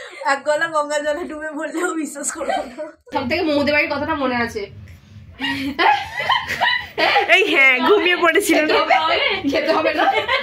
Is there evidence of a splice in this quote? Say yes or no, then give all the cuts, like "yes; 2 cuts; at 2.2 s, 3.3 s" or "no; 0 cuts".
yes; 1 cut; at 3.1 s